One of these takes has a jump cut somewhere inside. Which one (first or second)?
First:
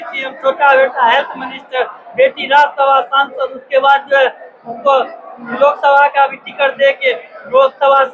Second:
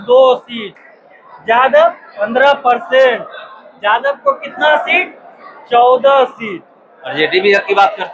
second